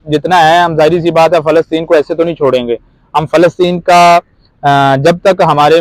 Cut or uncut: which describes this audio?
uncut